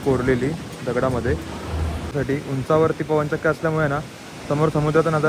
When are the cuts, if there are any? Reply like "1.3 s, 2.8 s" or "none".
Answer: 2.1 s